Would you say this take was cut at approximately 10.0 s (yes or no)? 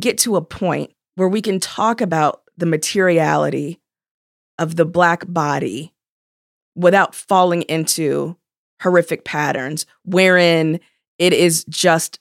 no